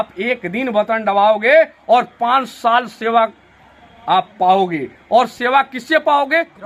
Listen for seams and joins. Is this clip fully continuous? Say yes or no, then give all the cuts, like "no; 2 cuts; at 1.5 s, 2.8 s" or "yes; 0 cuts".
yes; 0 cuts